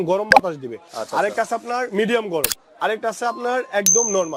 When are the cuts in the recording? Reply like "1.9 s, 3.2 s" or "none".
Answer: none